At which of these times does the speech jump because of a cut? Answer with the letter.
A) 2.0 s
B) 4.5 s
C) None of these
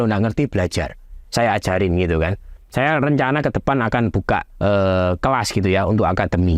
B